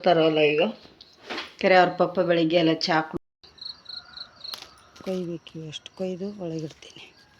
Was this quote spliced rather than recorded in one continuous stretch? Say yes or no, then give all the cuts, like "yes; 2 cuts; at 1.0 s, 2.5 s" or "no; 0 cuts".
yes; 1 cut; at 3.1 s